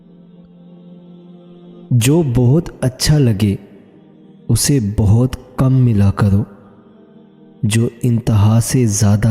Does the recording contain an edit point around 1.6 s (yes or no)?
yes